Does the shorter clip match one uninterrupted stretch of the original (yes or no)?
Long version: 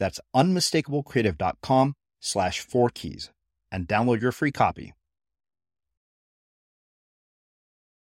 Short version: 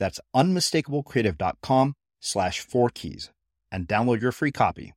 yes